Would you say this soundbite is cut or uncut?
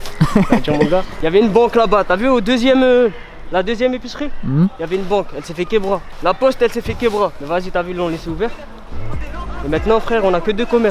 cut